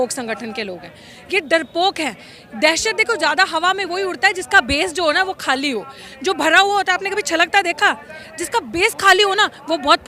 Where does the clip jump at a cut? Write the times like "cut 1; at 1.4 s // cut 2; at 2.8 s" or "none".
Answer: none